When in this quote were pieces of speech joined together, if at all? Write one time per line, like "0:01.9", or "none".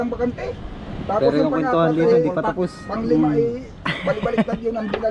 none